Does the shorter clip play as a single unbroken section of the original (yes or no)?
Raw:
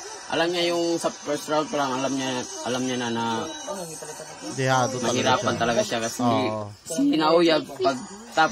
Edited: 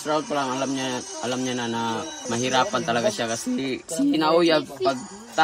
no